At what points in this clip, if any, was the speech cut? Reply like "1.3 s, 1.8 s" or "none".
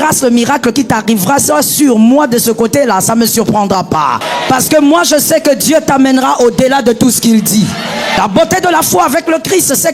4.3 s, 8.2 s